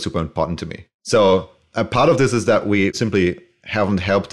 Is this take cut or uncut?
uncut